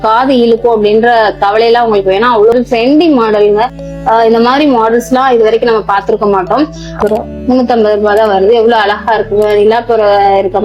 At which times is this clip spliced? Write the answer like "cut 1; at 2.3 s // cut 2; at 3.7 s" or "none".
cut 1; at 2.5 s // cut 2; at 7.0 s